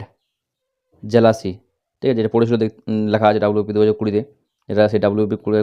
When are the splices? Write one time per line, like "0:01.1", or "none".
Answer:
none